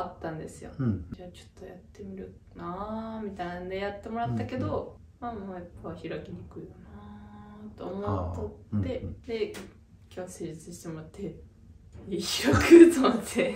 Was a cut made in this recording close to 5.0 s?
yes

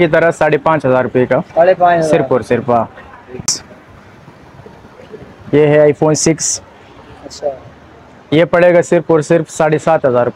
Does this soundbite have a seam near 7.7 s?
no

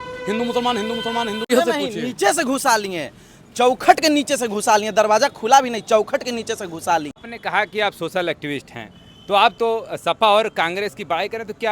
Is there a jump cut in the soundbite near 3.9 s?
no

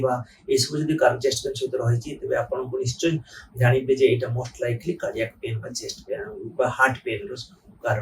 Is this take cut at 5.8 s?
no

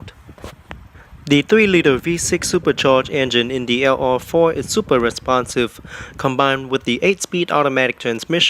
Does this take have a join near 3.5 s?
no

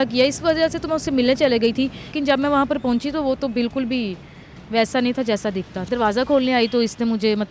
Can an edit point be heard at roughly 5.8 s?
yes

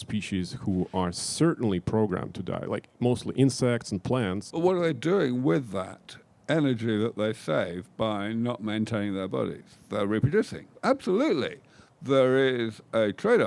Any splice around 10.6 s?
yes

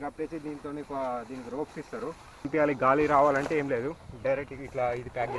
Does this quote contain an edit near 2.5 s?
yes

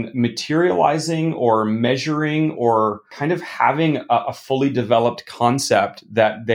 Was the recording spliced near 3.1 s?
yes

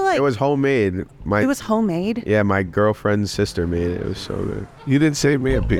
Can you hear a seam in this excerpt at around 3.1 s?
no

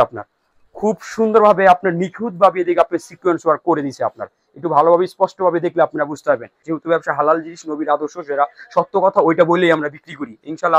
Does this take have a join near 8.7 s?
no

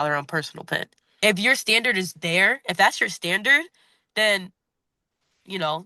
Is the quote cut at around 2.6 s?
no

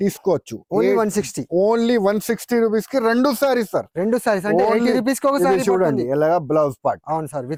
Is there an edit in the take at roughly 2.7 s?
no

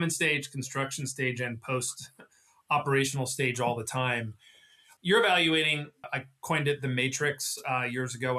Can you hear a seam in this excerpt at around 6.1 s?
yes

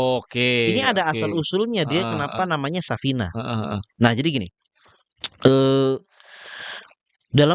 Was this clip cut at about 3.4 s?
no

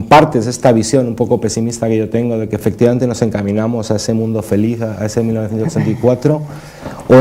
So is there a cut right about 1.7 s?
yes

